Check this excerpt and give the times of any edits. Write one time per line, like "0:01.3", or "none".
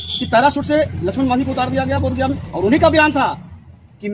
none